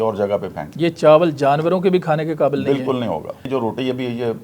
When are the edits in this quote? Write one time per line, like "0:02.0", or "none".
0:03.4

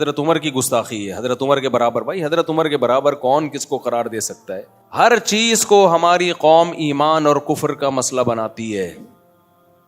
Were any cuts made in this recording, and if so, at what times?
0:04.8

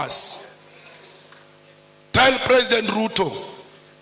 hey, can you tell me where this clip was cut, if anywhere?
none

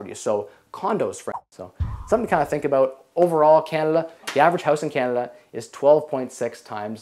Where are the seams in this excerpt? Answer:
0:01.2
0:04.2

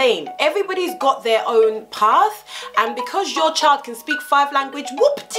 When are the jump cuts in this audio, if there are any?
none

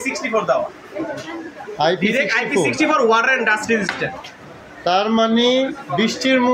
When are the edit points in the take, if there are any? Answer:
none

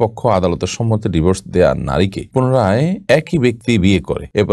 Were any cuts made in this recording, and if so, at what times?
none

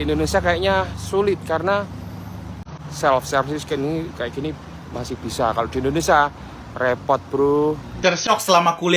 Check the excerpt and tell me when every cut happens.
0:02.6
0:08.0

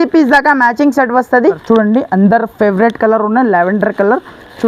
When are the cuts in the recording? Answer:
0:01.6

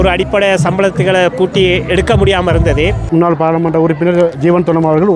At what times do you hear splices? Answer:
0:03.0

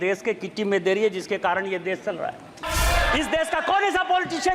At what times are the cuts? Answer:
0:02.6

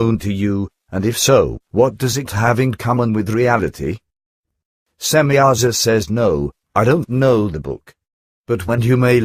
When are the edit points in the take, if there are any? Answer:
0:06.2

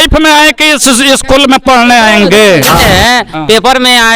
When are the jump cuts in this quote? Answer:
0:02.8

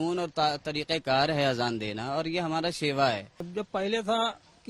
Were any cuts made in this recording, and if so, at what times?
0:03.4

